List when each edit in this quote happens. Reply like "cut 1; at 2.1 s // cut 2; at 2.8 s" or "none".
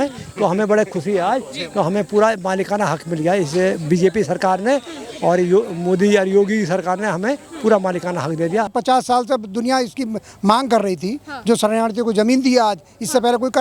cut 1; at 8.7 s